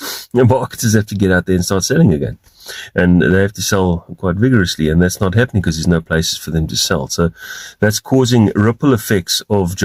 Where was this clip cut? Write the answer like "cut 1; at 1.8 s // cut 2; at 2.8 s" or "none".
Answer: none